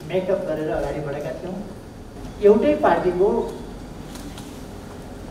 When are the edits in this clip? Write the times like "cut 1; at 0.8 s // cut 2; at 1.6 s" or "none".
cut 1; at 2.1 s